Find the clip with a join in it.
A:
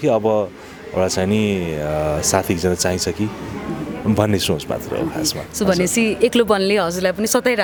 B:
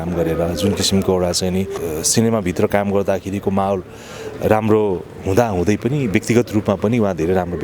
B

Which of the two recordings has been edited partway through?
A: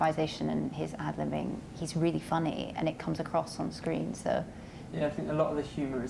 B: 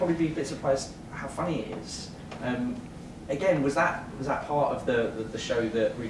A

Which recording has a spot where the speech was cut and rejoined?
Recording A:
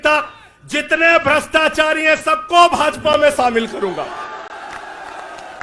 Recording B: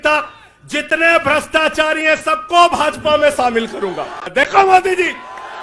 B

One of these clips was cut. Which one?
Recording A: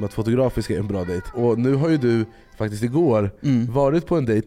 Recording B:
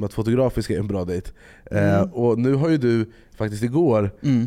A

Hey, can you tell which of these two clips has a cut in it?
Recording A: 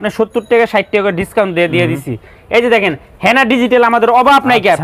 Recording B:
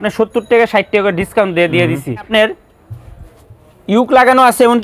B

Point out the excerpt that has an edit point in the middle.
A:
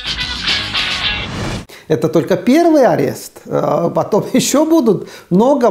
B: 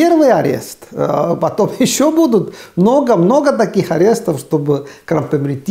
A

